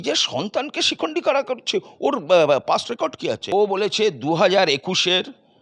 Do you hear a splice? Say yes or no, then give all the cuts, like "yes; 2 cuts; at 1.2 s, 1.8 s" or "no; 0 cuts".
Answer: yes; 1 cut; at 3.5 s